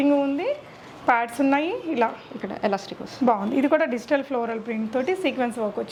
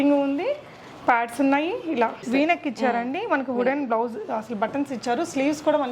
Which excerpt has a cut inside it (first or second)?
second